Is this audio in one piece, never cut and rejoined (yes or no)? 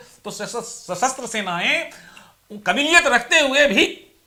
yes